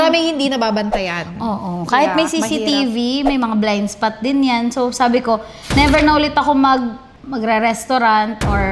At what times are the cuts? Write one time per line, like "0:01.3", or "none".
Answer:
none